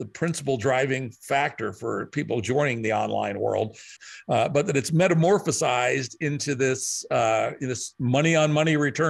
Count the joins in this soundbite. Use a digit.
1